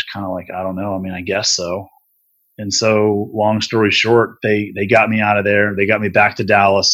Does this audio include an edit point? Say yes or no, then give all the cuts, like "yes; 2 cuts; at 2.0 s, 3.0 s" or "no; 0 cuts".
no; 0 cuts